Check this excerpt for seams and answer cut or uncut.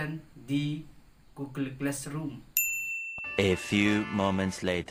uncut